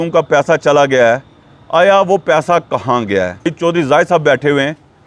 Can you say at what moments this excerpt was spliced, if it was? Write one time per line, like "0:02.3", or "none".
0:03.5